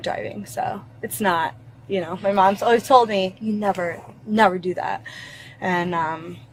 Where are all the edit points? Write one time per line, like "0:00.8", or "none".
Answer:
none